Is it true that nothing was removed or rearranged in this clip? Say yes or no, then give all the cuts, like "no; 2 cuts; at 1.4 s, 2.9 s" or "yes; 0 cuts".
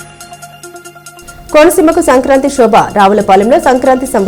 no; 1 cut; at 1.1 s